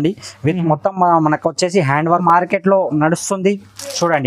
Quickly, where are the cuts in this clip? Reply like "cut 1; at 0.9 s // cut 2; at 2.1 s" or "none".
cut 1; at 2.2 s